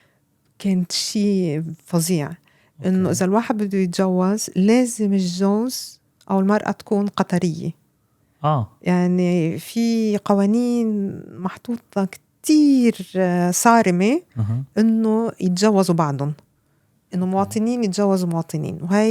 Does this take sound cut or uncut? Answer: uncut